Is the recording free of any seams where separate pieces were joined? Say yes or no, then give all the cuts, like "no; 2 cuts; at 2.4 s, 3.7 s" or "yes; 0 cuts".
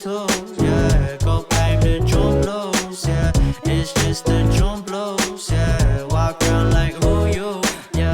no; 1 cut; at 1.5 s